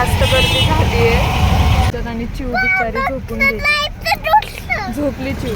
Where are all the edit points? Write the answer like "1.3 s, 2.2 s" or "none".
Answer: 1.9 s

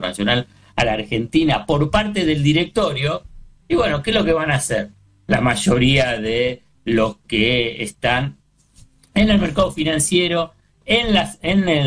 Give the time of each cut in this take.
none

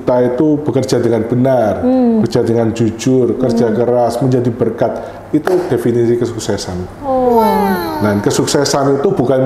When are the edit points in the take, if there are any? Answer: none

